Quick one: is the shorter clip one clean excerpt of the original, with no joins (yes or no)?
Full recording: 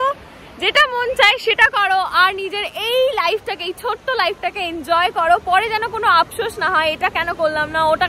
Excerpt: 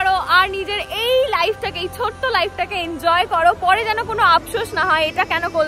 yes